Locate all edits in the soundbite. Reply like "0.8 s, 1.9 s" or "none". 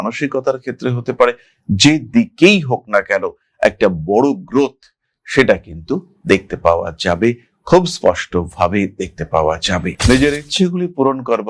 none